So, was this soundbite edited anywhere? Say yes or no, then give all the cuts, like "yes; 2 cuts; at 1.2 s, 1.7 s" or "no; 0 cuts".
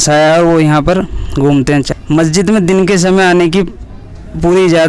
yes; 1 cut; at 1.9 s